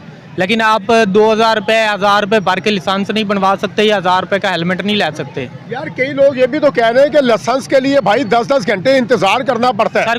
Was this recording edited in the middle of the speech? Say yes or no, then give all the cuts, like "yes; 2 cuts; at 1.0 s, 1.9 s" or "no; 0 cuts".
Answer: no; 0 cuts